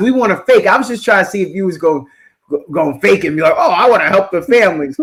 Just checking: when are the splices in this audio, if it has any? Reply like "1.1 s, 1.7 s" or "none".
none